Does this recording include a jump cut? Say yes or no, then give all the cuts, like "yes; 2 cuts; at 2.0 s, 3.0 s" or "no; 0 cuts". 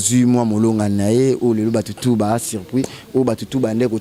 no; 0 cuts